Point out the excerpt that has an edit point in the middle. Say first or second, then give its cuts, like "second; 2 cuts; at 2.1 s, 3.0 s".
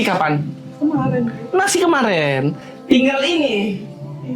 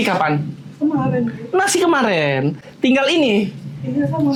first; 1 cut; at 2.7 s